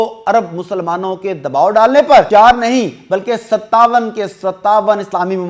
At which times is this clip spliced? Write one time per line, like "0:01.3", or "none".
0:02.3